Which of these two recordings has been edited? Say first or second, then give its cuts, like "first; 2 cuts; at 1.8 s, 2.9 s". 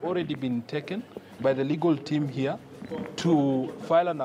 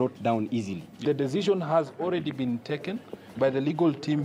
second; 1 cut; at 1.0 s